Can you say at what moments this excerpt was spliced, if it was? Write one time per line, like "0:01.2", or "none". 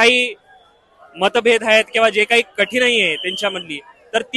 none